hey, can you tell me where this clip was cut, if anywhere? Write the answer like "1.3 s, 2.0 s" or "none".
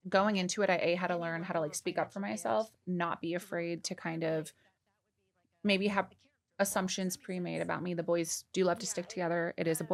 none